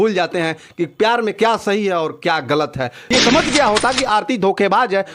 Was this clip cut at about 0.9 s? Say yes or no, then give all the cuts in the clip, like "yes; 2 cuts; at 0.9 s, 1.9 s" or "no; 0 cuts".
no; 1 cut; at 3.0 s